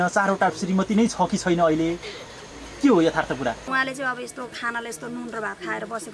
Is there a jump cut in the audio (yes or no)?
yes